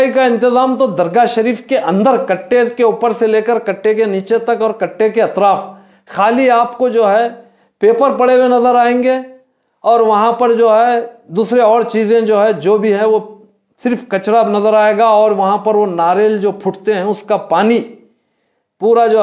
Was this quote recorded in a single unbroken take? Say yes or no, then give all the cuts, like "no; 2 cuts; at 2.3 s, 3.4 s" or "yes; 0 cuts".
yes; 0 cuts